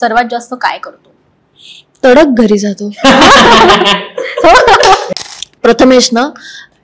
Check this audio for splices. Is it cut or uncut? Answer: cut